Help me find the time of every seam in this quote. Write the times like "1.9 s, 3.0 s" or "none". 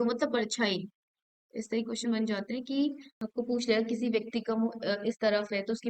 3.1 s